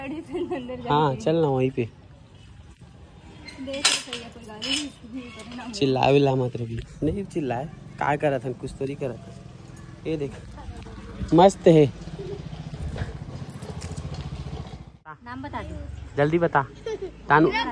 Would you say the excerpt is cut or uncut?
cut